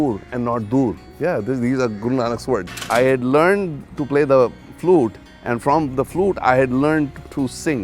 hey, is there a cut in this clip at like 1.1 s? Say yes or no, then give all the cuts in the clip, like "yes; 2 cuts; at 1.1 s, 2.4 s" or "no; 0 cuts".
yes; 2 cuts; at 1.1 s, 2.7 s